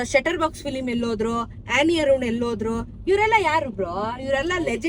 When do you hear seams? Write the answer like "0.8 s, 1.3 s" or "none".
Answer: none

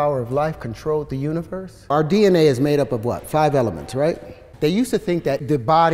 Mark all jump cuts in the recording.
1.7 s

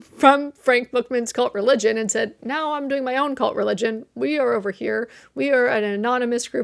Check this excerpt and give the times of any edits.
none

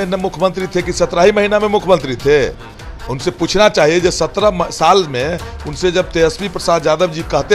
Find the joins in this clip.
none

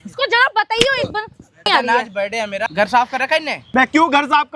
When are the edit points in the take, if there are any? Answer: 1.7 s, 2.7 s, 3.6 s

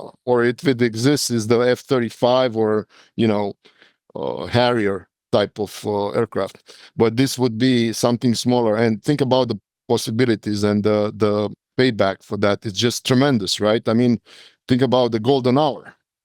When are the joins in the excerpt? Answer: 9.7 s, 13.0 s

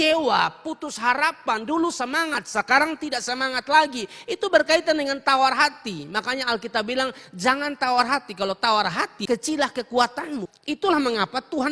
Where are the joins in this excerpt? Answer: 9.1 s, 10.5 s

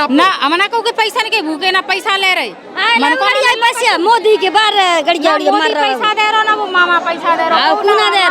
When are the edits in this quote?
none

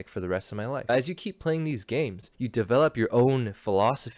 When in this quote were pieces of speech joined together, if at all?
0.9 s, 2.2 s

